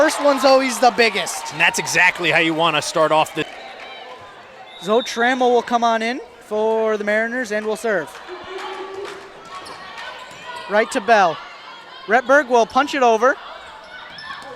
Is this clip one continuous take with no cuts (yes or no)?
no